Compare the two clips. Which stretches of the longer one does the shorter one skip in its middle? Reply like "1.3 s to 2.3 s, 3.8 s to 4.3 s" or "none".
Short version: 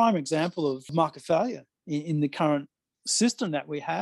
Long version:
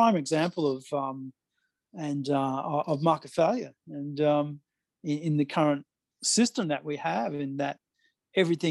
0.9 s to 3.0 s, 3.8 s to 4.9 s